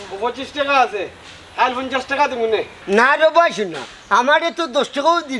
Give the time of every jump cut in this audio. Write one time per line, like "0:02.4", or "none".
none